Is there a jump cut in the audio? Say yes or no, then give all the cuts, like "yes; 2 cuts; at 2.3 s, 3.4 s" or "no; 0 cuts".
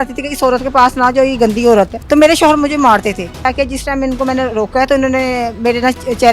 yes; 2 cuts; at 2.0 s, 3.4 s